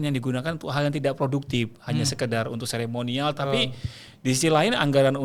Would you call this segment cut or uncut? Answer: uncut